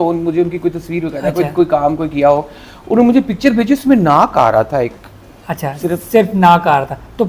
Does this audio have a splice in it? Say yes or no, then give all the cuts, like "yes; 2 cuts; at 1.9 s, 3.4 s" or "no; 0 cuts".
no; 0 cuts